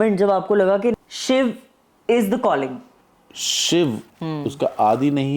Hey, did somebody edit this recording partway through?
yes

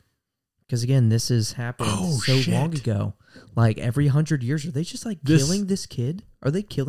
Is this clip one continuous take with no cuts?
yes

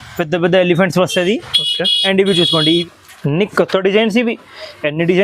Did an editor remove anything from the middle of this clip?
yes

